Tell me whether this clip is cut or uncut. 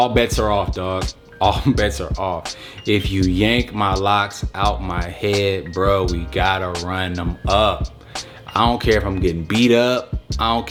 uncut